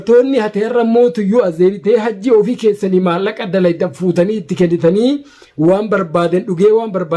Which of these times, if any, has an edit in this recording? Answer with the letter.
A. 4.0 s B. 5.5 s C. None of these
C